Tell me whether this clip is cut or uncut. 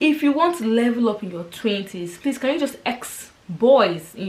uncut